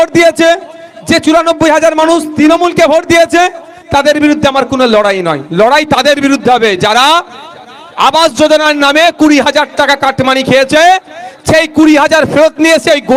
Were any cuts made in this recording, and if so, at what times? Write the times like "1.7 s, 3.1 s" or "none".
none